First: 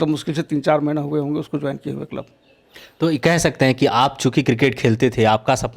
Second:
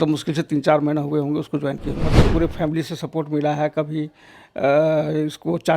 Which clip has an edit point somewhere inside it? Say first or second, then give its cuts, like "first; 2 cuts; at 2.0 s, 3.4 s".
second; 1 cut; at 2.0 s